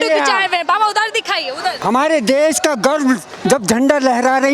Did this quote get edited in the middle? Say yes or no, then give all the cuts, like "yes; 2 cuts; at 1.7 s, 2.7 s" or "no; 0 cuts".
yes; 1 cut; at 1.8 s